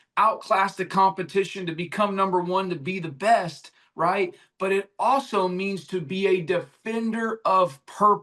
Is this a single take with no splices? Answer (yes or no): yes